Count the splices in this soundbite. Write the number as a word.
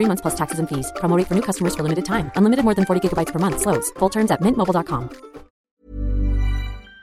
one